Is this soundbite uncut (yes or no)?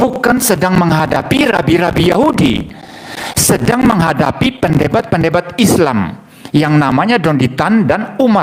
yes